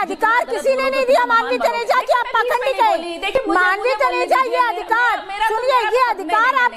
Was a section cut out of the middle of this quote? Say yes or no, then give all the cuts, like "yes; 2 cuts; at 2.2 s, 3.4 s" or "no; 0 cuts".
no; 0 cuts